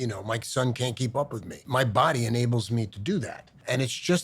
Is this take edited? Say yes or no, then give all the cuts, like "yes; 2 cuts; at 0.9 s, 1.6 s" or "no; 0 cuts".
yes; 1 cut; at 1.6 s